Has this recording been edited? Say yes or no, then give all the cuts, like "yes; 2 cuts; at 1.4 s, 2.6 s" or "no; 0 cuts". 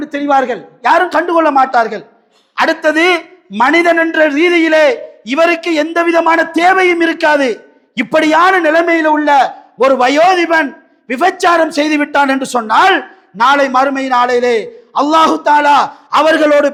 no; 0 cuts